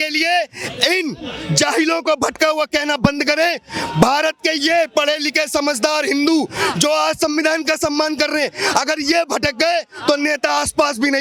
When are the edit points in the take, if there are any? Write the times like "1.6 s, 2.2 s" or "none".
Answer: none